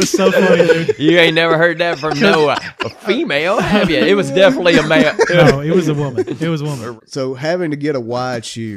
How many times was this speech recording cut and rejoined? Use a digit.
1